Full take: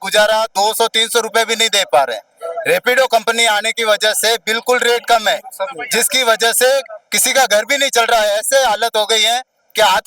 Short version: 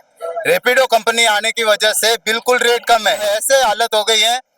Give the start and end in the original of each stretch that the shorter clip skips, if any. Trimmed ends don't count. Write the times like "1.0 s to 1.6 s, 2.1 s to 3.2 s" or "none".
5.4 s to 8.2 s